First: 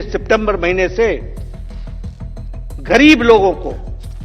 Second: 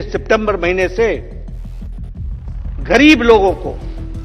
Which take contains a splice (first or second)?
first